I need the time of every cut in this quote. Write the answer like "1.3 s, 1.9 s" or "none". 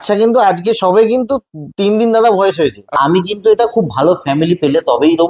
2.9 s